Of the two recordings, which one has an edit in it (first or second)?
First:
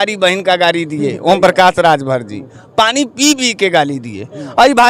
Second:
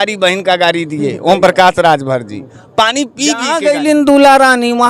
second